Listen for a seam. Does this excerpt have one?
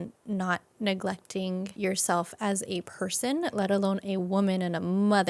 yes; 2 cuts; at 1.7 s, 2.9 s

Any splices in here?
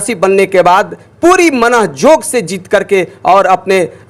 no; 0 cuts

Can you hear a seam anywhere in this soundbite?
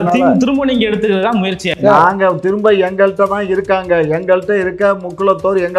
no; 0 cuts

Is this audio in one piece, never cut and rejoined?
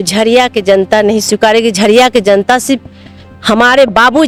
yes; 0 cuts

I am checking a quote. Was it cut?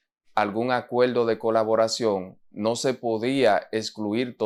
no; 0 cuts

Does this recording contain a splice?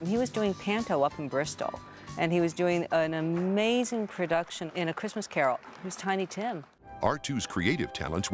yes; 1 cut; at 7.2 s

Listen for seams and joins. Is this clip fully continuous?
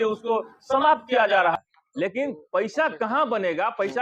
no; 1 cut; at 1.5 s

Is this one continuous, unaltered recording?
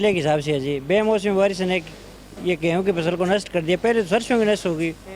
yes; 0 cuts

